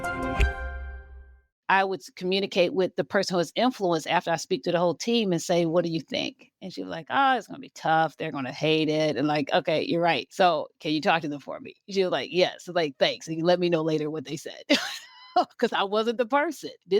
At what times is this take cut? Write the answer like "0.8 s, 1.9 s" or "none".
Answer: 1.5 s